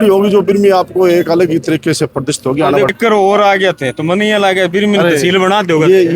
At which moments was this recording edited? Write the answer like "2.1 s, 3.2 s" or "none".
2.9 s